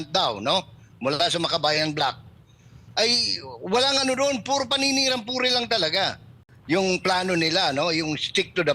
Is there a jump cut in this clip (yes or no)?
yes